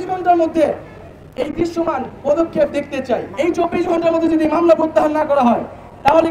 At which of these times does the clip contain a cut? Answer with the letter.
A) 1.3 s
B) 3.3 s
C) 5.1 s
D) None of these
B